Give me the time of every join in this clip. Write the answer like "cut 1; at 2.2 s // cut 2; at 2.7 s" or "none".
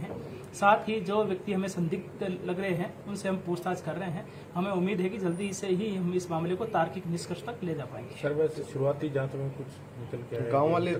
none